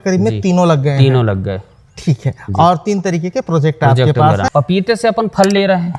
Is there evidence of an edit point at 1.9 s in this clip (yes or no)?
no